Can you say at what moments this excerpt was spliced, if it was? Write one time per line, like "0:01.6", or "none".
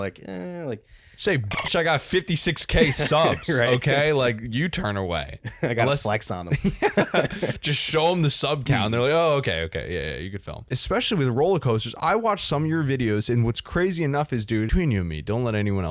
0:10.6
0:14.7